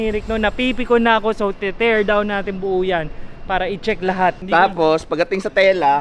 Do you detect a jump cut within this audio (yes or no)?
yes